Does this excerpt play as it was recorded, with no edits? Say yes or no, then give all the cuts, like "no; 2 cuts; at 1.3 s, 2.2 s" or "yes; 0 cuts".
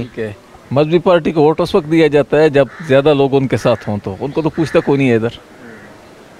yes; 0 cuts